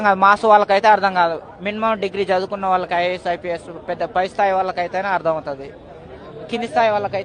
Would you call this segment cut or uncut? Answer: uncut